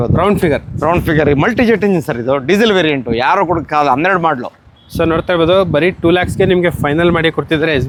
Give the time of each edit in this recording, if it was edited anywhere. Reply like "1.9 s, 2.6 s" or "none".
none